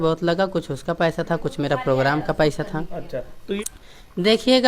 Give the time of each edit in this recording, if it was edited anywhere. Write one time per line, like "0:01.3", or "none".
0:03.6

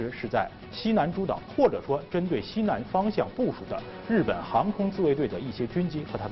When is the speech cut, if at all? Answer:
none

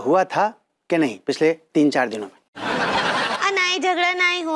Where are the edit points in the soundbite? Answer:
0:03.4

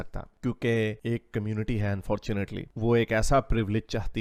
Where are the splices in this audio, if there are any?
none

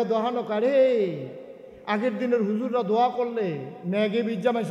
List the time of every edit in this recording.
none

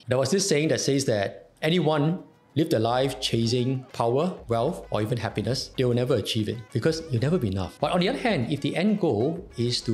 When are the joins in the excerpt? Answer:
0:01.5
0:07.7

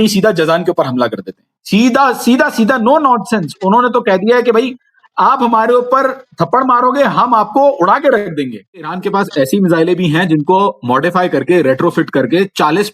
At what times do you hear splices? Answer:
0:09.0

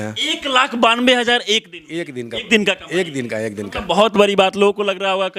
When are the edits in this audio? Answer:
none

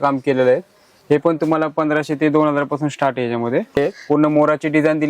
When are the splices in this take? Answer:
0:03.8

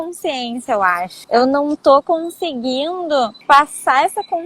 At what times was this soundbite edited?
0:01.2
0:03.4

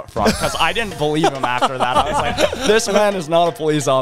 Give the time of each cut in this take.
none

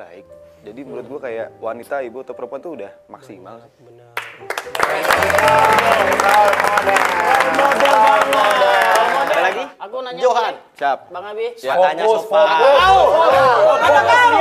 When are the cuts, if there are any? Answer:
none

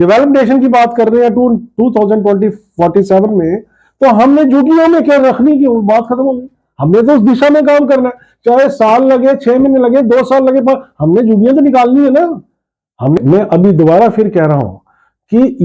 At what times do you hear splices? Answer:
0:13.2

